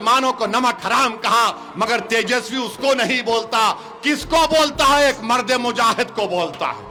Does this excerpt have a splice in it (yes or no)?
no